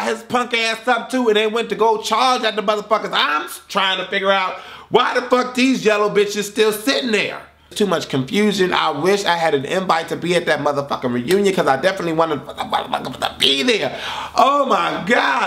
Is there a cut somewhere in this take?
yes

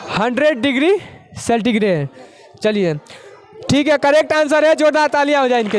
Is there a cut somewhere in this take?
no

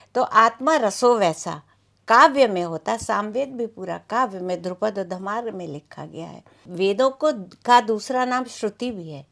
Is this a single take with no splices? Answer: no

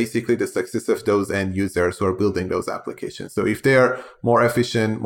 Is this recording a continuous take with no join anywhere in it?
yes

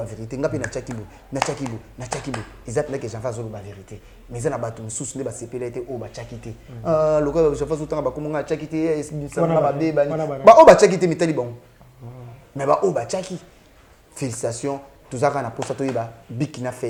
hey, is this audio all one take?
yes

